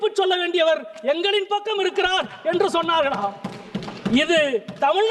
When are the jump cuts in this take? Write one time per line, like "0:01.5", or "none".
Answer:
none